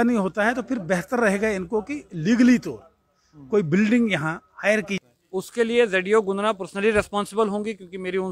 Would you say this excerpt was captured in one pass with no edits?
no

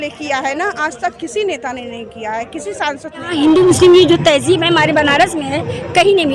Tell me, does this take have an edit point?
yes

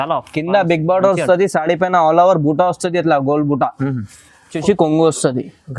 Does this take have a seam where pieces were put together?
yes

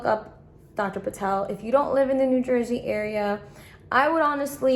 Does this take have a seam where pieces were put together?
no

